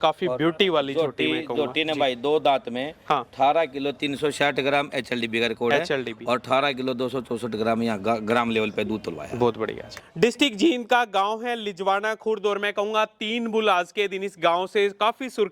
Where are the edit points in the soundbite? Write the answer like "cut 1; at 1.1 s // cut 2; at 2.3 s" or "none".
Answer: cut 1; at 10.0 s